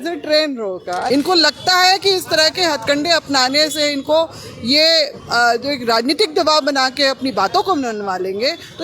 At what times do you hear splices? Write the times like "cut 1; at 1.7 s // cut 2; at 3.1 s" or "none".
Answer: cut 1; at 1.1 s